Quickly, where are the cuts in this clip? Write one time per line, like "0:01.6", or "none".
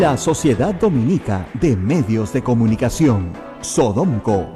none